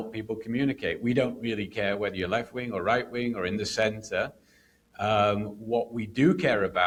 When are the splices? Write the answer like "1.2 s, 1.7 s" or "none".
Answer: none